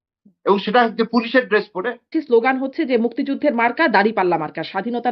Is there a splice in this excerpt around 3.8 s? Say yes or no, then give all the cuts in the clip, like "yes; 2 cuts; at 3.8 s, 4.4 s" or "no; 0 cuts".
no; 1 cut; at 2.1 s